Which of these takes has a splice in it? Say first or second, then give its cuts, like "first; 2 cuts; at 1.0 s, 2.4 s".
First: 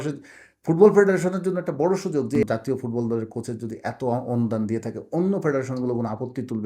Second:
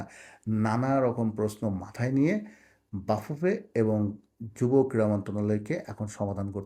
first; 1 cut; at 2.4 s